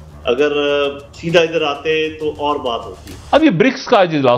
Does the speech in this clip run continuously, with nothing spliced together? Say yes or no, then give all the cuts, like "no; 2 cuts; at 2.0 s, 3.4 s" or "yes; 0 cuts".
no; 1 cut; at 2.9 s